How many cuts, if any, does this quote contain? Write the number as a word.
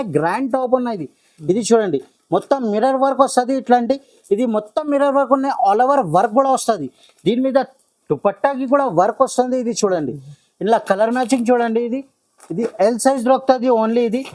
zero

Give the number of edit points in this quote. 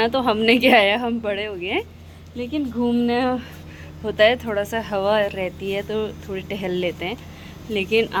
zero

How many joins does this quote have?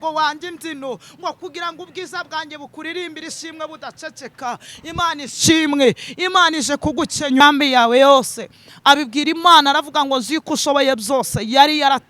one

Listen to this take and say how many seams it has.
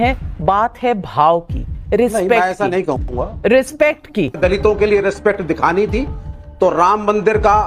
one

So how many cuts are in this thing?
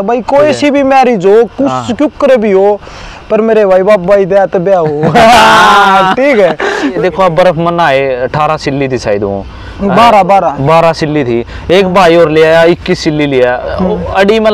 one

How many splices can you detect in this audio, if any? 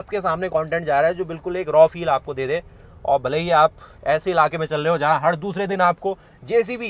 zero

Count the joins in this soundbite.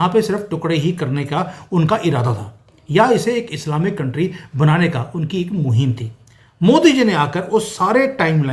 zero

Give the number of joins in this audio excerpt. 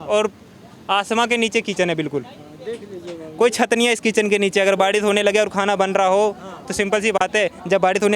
zero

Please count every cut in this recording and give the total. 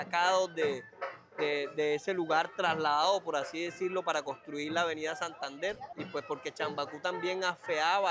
one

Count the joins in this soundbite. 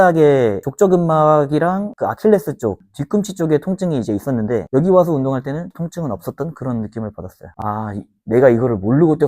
two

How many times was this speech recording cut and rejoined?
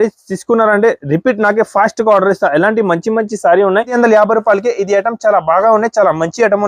one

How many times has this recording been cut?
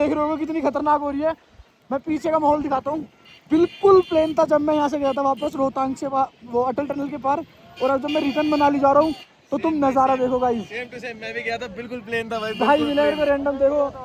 zero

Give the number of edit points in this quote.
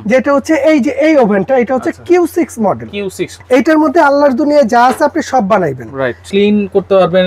two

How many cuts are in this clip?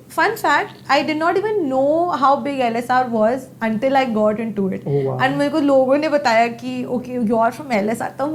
zero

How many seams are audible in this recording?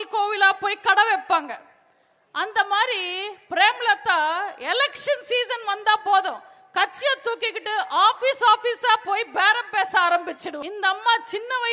one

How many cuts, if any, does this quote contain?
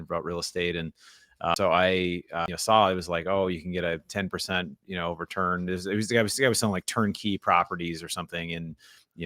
two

